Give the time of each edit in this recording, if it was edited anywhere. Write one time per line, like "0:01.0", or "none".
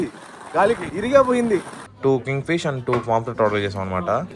0:00.9
0:01.8